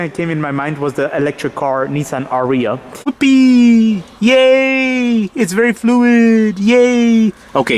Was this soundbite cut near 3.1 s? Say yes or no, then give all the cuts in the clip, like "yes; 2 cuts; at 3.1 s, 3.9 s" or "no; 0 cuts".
yes; 1 cut; at 3.1 s